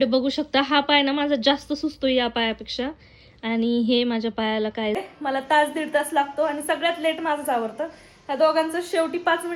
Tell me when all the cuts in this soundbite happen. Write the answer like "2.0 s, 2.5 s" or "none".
5.0 s